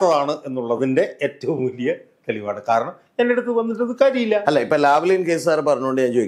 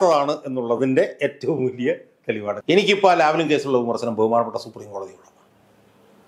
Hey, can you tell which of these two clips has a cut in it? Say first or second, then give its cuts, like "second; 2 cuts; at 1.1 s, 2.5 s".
second; 1 cut; at 2.6 s